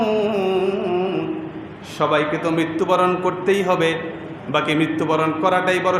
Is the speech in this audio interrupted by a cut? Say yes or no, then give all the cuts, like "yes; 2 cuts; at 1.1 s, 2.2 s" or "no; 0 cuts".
no; 0 cuts